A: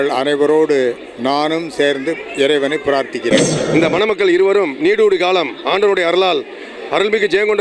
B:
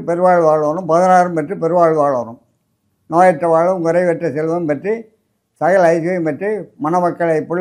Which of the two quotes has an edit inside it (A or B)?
A